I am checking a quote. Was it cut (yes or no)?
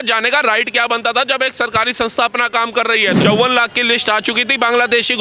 yes